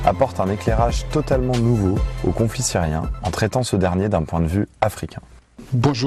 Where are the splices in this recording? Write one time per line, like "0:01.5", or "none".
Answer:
0:02.6